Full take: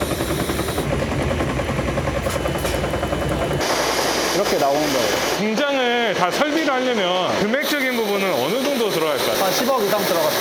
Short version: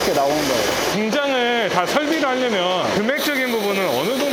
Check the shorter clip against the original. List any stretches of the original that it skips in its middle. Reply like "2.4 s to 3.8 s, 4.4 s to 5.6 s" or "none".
none